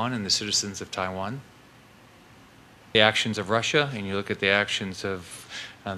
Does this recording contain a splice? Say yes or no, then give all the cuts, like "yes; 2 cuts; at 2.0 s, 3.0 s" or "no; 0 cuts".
yes; 1 cut; at 2.9 s